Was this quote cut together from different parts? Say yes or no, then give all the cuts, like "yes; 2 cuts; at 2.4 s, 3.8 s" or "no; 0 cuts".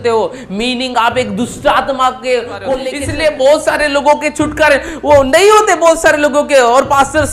yes; 1 cut; at 2.9 s